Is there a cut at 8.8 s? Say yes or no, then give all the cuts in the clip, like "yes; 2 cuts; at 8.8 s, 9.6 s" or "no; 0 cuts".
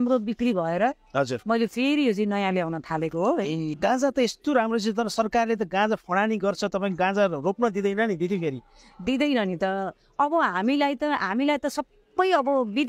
no; 1 cut; at 3.7 s